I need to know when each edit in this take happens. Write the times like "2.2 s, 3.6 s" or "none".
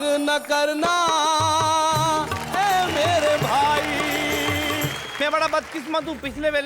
5.0 s